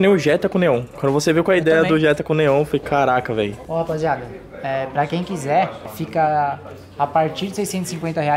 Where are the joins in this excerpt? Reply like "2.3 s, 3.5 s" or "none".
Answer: none